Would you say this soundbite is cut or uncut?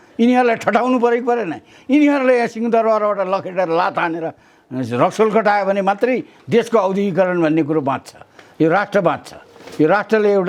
uncut